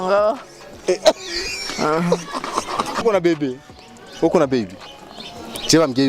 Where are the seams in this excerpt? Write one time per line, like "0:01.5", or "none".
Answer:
0:03.0